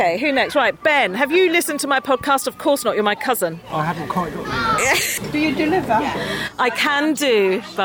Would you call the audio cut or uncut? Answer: cut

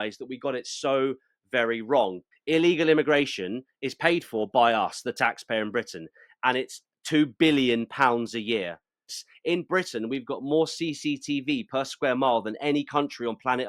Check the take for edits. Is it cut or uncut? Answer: cut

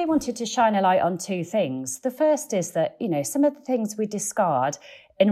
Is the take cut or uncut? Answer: uncut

